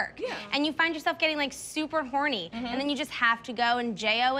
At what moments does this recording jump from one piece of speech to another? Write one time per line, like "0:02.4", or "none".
0:02.5